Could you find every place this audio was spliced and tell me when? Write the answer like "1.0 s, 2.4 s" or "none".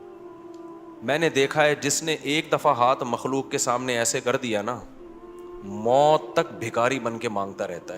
1.0 s